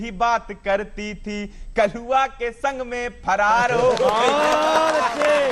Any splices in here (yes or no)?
no